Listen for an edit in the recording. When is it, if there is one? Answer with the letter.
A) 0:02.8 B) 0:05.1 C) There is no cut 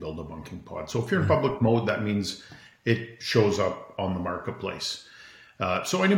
C